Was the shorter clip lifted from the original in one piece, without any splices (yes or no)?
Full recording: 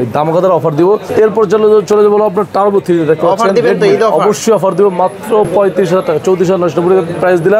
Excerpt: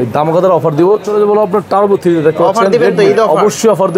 no